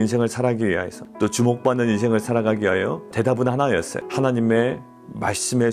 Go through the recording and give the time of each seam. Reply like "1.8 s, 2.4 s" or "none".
1.0 s, 3.0 s, 4.0 s